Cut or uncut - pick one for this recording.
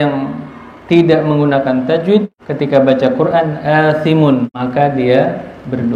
cut